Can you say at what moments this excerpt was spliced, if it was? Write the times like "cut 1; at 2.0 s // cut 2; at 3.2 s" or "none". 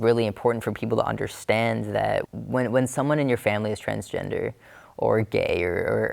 cut 1; at 2.3 s

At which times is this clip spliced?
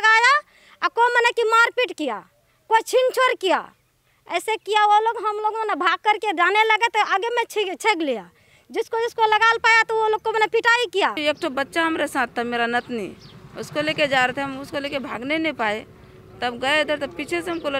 cut 1; at 11.2 s

